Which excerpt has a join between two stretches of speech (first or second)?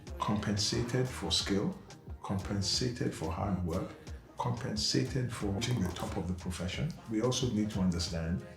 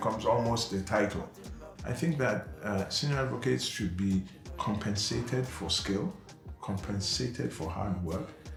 first